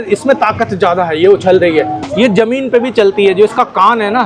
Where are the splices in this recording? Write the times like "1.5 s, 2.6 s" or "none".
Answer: 2.0 s